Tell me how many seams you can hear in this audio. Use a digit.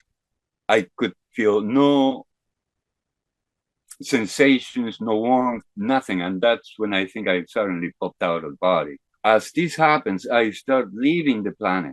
1